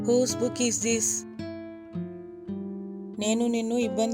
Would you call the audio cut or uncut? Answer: cut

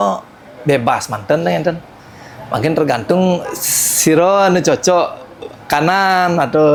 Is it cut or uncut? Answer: uncut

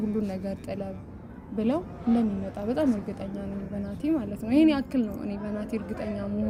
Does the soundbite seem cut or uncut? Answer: uncut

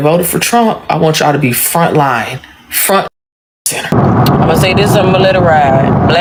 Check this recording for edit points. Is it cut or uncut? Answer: uncut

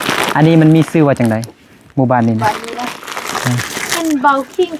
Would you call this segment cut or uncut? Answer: uncut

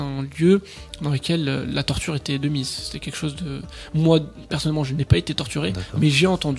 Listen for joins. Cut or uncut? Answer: uncut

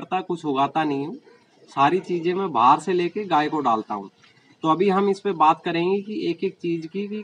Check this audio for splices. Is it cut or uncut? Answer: uncut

